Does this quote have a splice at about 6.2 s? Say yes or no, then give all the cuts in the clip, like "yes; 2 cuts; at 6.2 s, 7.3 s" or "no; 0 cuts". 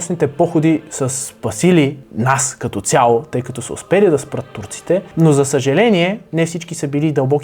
yes; 3 cuts; at 2.1 s, 5.1 s, 6.2 s